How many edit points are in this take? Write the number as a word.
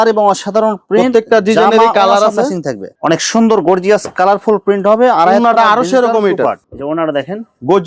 one